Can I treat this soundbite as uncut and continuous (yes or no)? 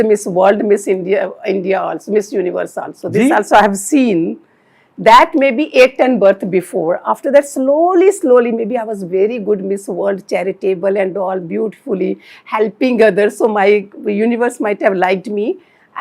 yes